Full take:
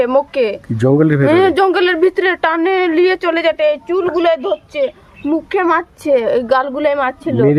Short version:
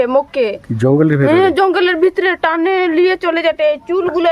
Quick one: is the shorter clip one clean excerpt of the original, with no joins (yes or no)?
yes